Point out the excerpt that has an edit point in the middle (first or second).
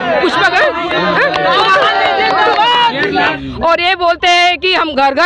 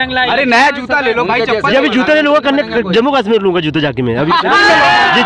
first